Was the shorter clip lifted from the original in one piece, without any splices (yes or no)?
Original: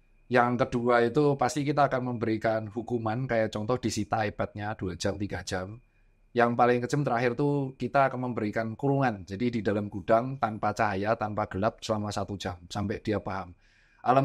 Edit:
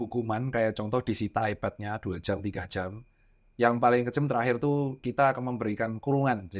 yes